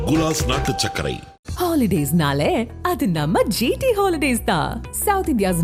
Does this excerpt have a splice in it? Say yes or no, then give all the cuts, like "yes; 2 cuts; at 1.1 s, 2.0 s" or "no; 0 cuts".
no; 0 cuts